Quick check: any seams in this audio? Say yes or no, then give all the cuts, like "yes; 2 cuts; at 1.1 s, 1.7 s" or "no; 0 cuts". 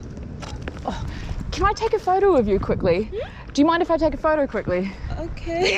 no; 0 cuts